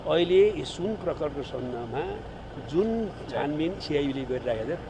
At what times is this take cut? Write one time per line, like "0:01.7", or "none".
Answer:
none